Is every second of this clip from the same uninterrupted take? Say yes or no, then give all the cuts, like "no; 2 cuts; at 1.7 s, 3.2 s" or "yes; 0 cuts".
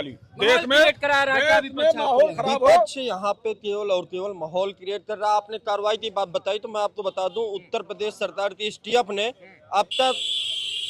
yes; 0 cuts